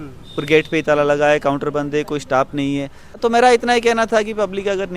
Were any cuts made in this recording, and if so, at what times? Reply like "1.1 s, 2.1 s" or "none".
3.2 s